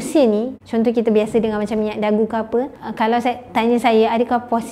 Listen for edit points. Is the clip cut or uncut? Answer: cut